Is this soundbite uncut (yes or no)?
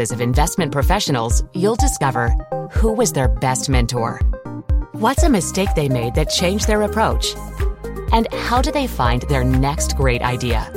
yes